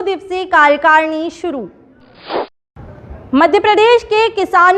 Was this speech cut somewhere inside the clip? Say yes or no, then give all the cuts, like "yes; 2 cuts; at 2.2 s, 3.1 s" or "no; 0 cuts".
yes; 1 cut; at 2.5 s